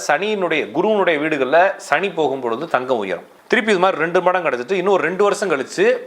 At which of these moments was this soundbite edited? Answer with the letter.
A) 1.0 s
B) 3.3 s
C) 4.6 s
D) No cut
B